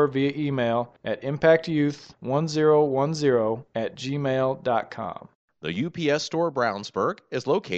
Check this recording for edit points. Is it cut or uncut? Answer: cut